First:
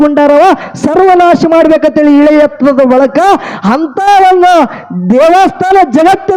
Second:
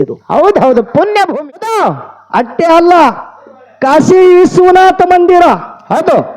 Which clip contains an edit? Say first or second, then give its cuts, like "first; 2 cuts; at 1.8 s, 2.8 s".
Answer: second; 1 cut; at 1.3 s